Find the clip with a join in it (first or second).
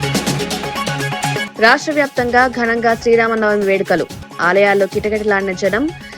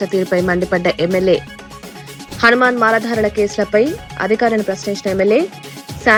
first